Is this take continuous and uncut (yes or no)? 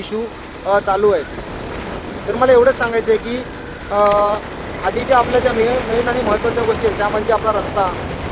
yes